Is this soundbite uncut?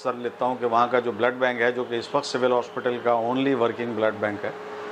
yes; 0 cuts

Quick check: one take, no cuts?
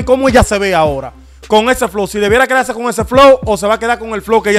yes; 0 cuts

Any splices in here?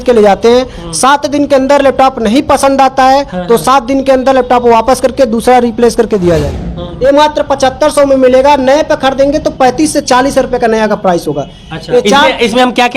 yes; 1 cut; at 6.7 s

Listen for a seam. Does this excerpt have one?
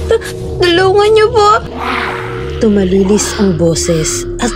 no; 0 cuts

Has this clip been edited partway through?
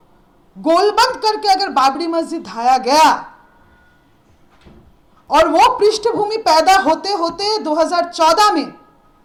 no; 0 cuts

